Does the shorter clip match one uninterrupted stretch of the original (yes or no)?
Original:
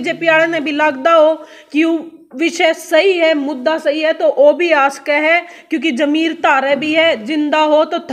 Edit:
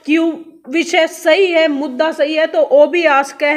yes